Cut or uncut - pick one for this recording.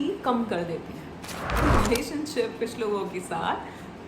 cut